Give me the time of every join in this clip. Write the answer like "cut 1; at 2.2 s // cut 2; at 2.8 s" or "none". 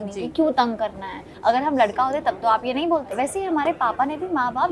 cut 1; at 1.2 s // cut 2; at 3.1 s